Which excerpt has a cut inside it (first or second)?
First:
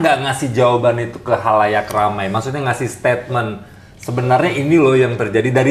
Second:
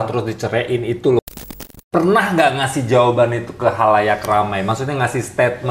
second